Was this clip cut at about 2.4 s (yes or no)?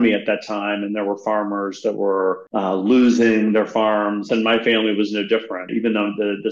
yes